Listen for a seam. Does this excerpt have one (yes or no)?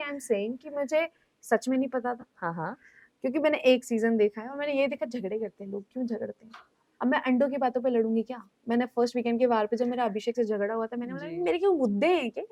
no